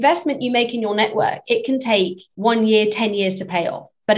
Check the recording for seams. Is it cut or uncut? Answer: cut